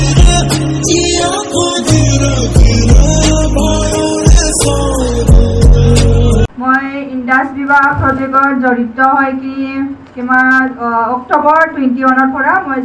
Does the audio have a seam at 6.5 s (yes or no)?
yes